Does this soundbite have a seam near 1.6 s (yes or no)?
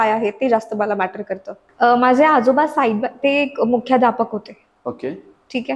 yes